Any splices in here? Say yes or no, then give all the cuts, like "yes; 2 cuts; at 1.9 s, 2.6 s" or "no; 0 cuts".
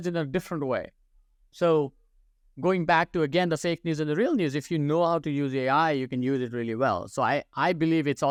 no; 0 cuts